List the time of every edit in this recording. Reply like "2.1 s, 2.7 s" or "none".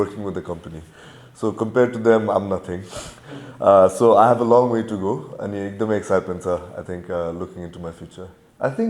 none